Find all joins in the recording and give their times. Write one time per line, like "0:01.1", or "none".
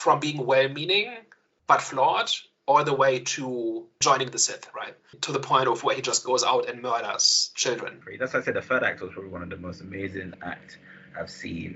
0:04.0
0:10.3